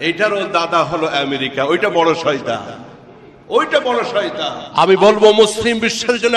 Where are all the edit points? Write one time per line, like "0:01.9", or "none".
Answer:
0:04.6